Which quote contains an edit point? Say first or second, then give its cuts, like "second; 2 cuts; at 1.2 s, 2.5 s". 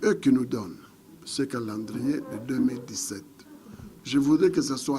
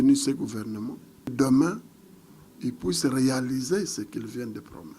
second; 1 cut; at 1.3 s